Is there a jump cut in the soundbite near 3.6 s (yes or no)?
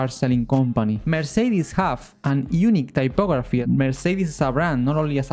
yes